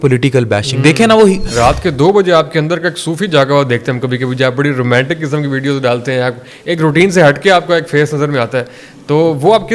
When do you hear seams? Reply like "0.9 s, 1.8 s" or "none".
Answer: 1.5 s